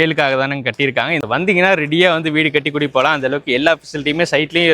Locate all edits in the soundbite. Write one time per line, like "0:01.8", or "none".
0:01.2